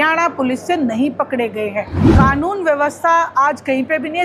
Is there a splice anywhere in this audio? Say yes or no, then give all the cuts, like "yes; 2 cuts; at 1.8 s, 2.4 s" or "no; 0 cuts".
yes; 1 cut; at 2.0 s